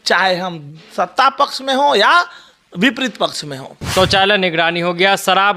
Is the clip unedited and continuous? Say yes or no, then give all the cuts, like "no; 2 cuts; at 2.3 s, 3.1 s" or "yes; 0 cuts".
no; 1 cut; at 3.8 s